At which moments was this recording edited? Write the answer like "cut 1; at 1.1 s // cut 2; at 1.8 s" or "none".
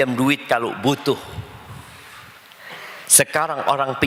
none